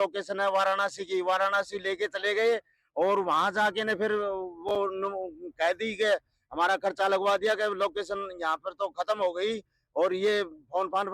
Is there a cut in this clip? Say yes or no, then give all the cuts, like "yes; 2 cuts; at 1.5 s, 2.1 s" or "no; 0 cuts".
no; 0 cuts